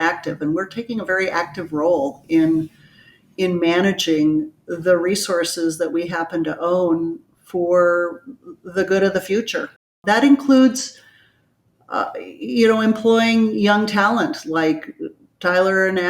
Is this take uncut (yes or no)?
no